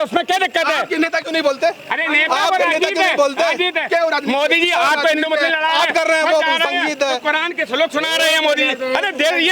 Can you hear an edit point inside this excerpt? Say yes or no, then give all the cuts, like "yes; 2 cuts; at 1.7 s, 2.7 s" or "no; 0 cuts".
no; 0 cuts